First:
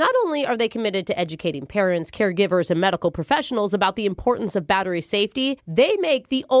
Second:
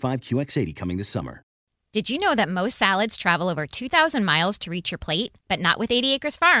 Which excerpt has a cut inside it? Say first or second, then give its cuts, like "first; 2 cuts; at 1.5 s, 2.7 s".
second; 1 cut; at 1.6 s